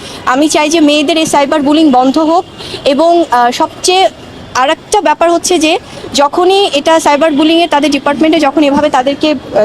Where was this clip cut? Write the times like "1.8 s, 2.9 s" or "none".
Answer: none